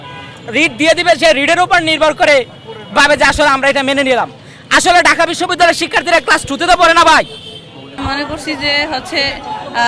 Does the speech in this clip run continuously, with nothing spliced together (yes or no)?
no